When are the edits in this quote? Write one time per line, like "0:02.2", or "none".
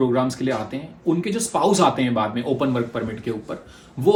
none